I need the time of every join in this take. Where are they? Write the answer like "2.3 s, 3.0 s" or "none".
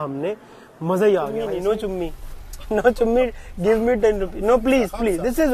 1.5 s